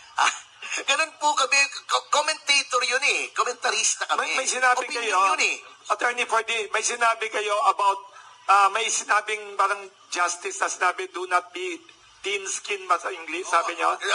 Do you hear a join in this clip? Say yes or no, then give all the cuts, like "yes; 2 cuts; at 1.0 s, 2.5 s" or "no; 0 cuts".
no; 0 cuts